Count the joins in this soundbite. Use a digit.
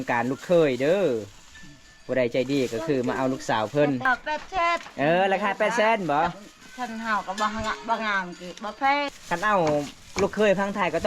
2